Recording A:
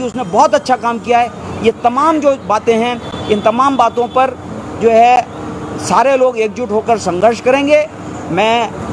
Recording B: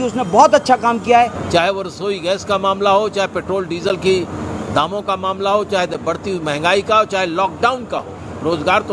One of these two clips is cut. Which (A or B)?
B